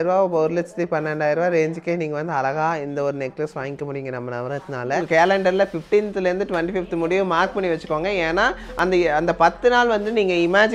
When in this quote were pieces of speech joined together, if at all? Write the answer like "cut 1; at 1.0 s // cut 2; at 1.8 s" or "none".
cut 1; at 5.0 s